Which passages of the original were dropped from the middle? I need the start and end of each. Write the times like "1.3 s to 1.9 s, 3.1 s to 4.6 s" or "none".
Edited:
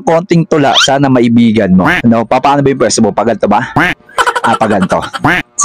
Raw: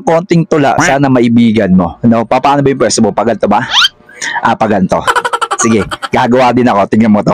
none